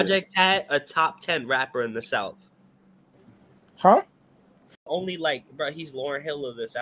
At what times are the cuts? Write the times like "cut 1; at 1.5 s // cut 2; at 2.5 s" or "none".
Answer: cut 1; at 4.8 s